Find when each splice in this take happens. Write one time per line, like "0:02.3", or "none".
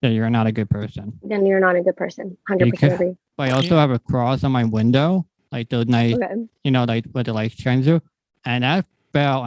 0:03.3